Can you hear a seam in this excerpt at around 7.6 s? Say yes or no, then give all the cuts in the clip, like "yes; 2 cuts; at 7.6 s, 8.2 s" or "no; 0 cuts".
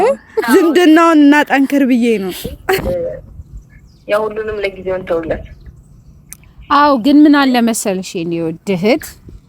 no; 1 cut; at 2.9 s